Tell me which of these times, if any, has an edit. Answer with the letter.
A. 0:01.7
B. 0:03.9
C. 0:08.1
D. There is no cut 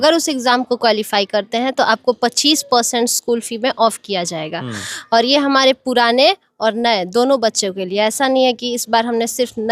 D